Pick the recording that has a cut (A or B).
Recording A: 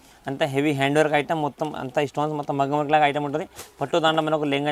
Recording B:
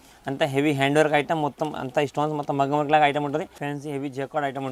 B